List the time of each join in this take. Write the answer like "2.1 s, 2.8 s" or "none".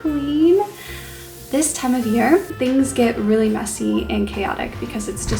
1.4 s, 2.5 s